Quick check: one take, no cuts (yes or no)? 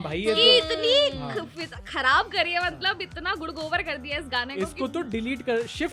yes